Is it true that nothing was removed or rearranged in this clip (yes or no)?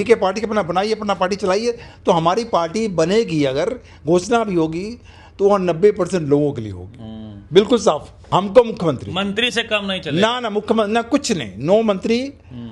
no